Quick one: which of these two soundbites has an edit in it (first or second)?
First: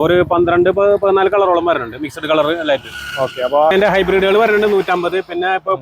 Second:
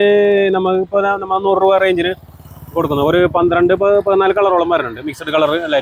first